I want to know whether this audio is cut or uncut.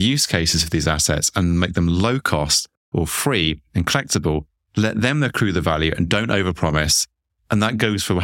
uncut